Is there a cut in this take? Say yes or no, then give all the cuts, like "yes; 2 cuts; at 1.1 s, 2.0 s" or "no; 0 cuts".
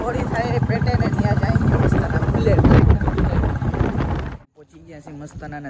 yes; 1 cut; at 4.3 s